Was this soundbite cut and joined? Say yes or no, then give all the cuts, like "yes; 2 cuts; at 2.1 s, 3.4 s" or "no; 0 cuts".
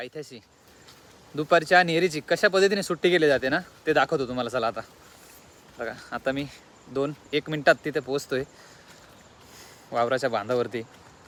no; 0 cuts